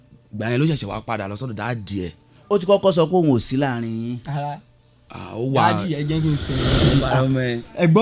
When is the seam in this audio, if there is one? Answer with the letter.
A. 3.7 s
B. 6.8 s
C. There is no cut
B